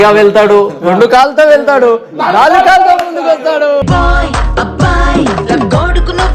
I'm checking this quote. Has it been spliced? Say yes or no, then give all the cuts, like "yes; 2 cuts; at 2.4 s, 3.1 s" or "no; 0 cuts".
no; 0 cuts